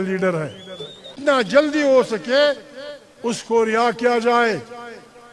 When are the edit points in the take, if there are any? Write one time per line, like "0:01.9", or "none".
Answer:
0:01.1